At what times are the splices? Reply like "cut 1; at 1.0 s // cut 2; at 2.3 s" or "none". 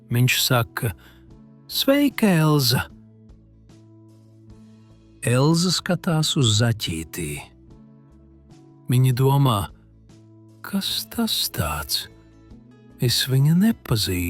cut 1; at 2.9 s // cut 2; at 5.2 s // cut 3; at 7.5 s // cut 4; at 8.8 s